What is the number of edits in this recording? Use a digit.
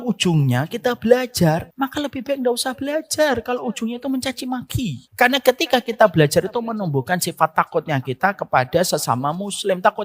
2